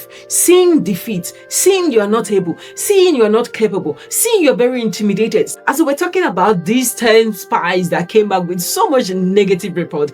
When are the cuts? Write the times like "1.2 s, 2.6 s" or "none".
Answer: 5.5 s